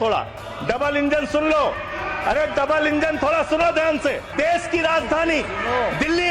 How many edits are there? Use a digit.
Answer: 1